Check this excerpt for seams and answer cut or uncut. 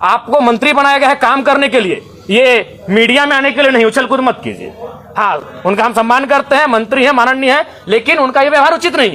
uncut